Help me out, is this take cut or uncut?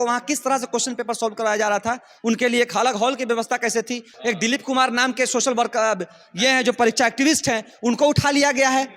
cut